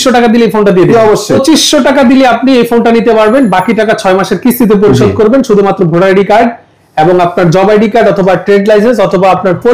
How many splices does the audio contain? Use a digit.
1